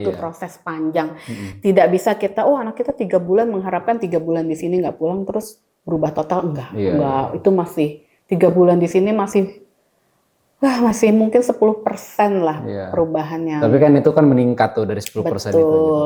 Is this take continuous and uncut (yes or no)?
yes